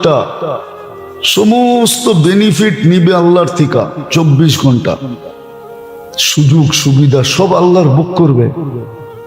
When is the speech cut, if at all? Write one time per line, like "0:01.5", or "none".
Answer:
none

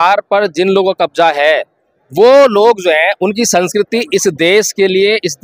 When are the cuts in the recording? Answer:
none

